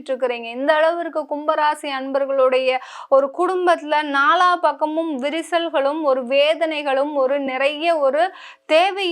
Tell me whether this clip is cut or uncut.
uncut